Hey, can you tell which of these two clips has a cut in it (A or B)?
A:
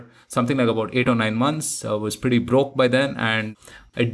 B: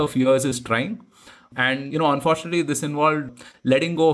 B